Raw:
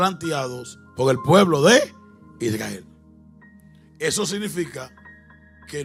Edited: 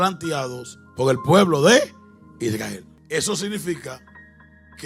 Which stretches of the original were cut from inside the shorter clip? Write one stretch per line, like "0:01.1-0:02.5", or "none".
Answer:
0:02.9-0:03.8